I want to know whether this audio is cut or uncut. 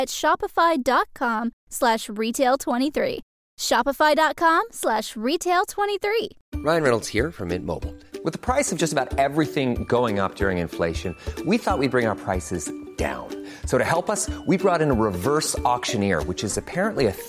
cut